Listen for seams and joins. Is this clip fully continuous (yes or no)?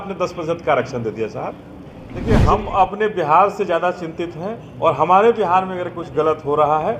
no